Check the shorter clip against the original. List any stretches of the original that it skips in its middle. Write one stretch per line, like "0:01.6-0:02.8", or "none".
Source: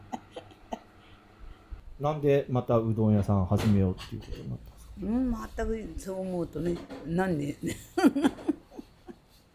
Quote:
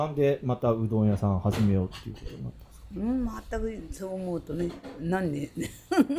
none